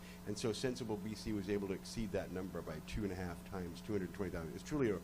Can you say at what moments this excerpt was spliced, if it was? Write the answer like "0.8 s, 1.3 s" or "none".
3.7 s